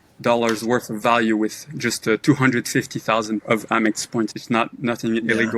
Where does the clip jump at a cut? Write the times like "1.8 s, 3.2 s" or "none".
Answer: 3.4 s, 4.3 s